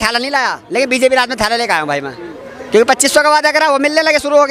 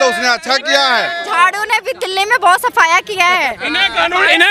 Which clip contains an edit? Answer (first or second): second